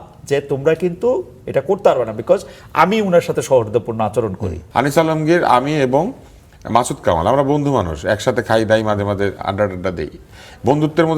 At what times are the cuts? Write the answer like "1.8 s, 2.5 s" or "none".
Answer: 4.5 s